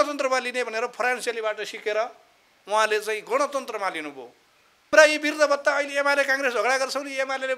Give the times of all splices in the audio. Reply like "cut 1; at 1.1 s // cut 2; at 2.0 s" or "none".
cut 1; at 4.9 s